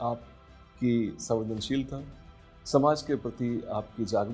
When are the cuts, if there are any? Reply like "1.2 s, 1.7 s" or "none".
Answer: none